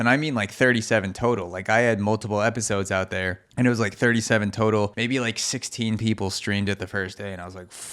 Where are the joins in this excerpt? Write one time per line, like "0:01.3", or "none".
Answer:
0:03.4
0:04.9